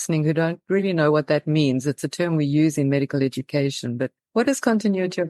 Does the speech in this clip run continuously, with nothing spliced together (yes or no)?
no